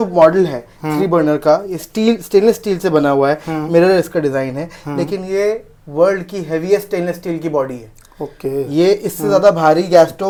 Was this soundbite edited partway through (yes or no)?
no